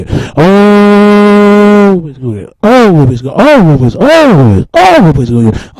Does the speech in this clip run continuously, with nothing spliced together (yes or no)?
no